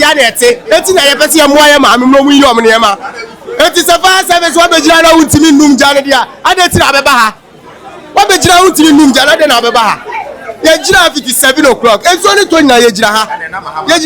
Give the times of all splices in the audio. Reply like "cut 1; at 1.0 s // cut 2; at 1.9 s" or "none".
none